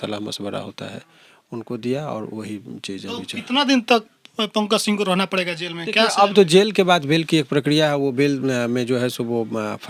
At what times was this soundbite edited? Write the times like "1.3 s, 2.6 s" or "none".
none